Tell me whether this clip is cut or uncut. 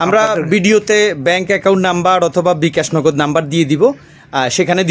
uncut